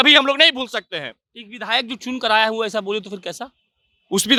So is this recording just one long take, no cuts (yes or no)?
yes